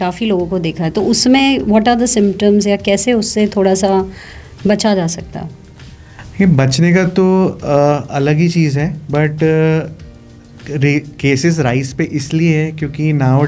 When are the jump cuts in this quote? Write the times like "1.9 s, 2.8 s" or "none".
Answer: none